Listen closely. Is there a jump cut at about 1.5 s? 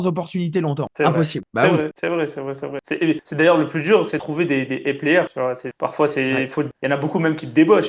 no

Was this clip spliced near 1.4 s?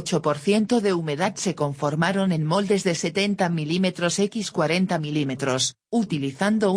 no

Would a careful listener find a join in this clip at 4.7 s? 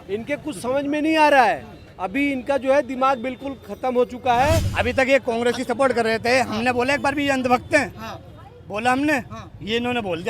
yes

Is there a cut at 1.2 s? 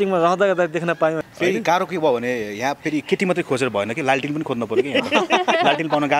yes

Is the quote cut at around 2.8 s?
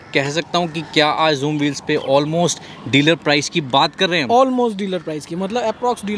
no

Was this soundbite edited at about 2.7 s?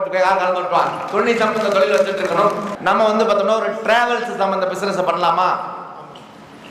yes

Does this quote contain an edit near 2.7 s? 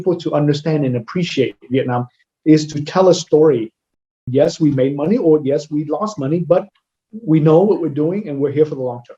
no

